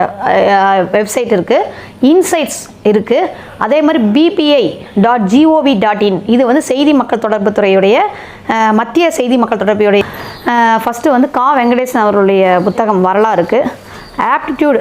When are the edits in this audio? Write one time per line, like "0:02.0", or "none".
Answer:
0:10.0